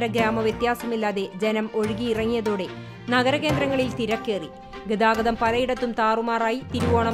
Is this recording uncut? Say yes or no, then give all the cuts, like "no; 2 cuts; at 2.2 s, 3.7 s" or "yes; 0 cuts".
yes; 0 cuts